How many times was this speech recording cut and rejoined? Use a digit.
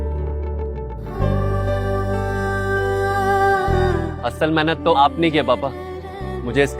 1